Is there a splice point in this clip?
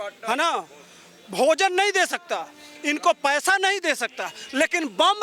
no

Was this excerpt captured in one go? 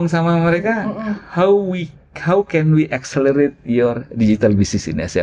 yes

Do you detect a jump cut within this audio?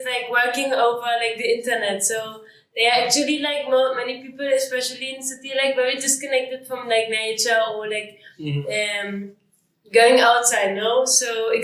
no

